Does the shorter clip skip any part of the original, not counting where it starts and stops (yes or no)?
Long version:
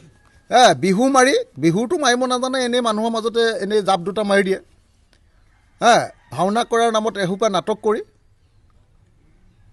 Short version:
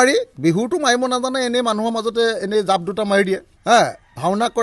yes